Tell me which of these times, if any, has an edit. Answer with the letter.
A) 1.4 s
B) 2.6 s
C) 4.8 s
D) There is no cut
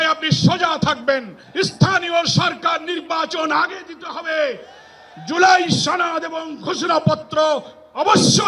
A